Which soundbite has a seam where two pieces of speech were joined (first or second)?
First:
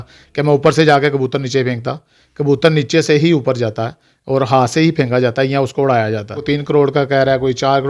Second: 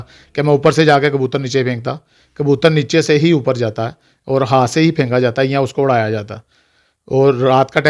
first